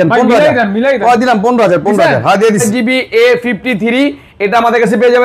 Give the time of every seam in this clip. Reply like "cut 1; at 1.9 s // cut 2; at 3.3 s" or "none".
cut 1; at 2.6 s